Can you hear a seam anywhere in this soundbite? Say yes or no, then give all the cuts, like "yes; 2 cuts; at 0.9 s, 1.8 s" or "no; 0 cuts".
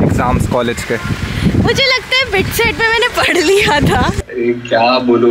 yes; 1 cut; at 4.2 s